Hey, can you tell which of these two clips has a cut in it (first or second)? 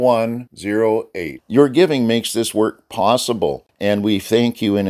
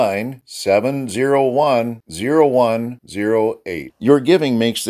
first